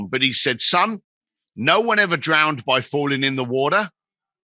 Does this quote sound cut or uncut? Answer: uncut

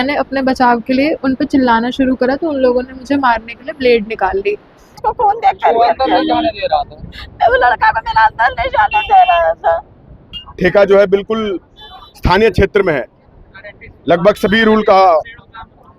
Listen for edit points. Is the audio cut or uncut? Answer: cut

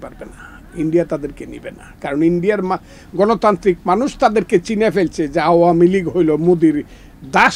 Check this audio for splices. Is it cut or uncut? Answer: uncut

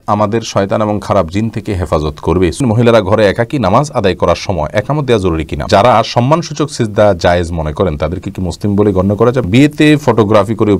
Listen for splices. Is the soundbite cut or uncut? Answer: cut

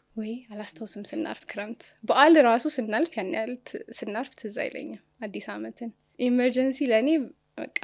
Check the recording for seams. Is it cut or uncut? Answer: cut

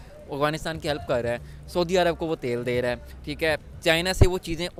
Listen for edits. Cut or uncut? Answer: uncut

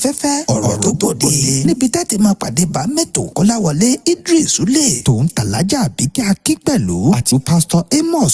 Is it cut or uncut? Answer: cut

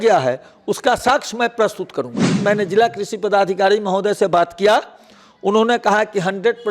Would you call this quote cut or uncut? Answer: cut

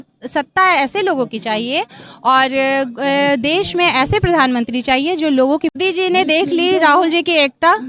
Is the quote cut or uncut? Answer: cut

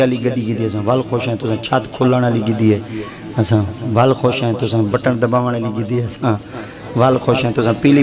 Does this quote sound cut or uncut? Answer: uncut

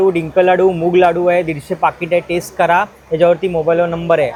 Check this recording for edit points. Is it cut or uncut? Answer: uncut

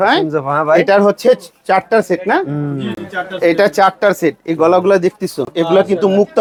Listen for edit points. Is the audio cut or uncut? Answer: uncut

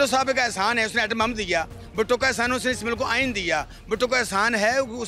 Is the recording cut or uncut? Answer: uncut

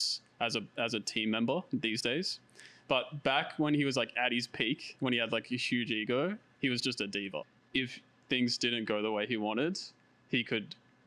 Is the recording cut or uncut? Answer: cut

